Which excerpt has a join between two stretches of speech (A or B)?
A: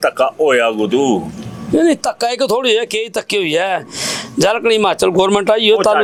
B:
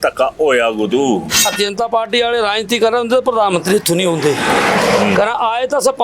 B